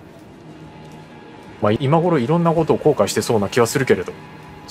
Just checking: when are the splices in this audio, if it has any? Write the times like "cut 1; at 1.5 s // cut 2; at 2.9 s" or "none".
cut 1; at 1.8 s